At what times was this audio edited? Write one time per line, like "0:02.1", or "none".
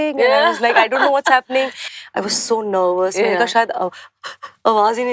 0:01.8